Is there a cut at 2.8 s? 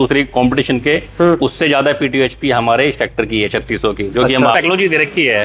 no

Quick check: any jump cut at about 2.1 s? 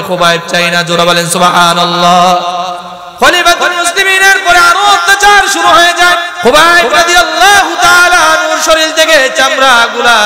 no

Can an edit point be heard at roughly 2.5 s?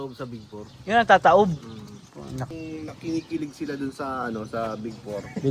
yes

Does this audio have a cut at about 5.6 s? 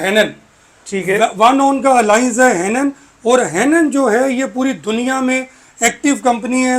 no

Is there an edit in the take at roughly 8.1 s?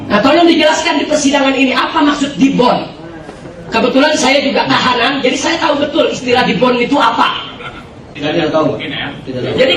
yes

